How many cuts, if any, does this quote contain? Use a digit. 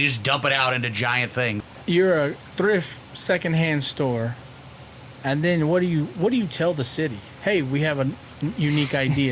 1